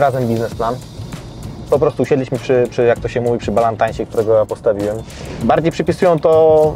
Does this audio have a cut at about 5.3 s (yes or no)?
yes